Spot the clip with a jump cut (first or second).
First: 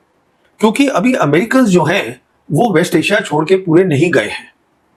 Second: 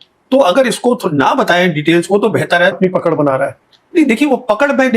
second